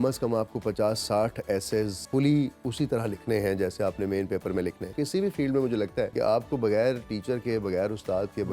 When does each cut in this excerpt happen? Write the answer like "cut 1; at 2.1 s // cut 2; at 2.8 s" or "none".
cut 1; at 2.0 s // cut 2; at 4.9 s // cut 3; at 6.1 s